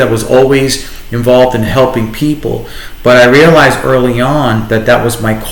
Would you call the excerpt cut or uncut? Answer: uncut